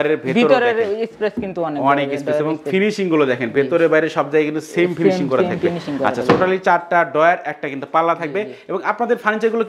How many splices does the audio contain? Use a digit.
0